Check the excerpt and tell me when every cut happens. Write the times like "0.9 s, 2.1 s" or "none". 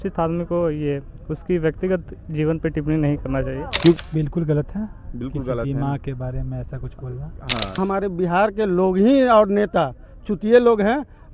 4.0 s, 7.8 s